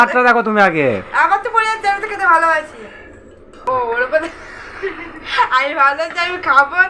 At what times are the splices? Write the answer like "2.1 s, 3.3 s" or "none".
3.6 s